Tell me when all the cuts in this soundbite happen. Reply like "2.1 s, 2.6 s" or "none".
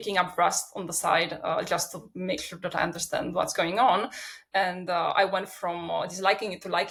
none